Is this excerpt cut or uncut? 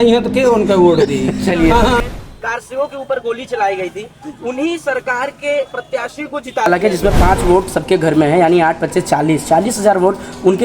cut